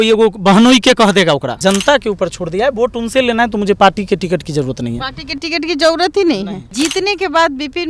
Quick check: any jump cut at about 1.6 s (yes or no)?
yes